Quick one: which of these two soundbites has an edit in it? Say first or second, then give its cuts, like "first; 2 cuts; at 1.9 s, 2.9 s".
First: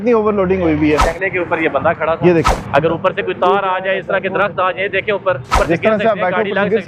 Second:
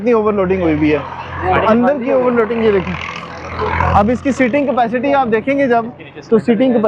first; 3 cuts; at 1.1 s, 2.6 s, 5.5 s